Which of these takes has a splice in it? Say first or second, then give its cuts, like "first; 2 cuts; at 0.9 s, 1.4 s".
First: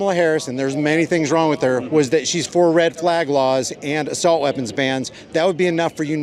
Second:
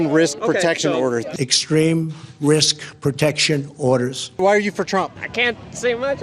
second; 3 cuts; at 1.3 s, 4.2 s, 5.2 s